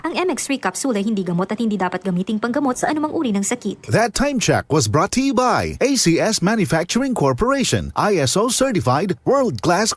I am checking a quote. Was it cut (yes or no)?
yes